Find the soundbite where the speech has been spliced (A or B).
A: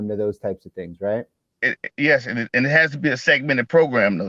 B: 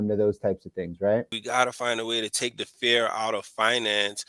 B